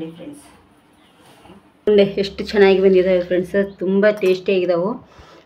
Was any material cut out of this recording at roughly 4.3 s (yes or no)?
no